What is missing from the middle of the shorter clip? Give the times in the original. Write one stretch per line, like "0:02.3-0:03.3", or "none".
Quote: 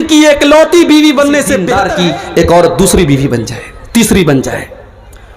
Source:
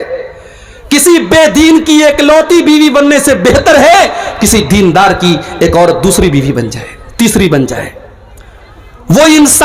0:03.5-0:05.0